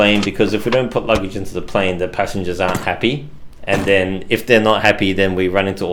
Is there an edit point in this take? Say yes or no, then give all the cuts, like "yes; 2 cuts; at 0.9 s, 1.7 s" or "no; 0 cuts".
no; 0 cuts